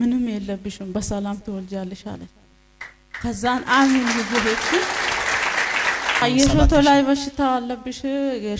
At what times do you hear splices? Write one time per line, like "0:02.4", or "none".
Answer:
0:06.2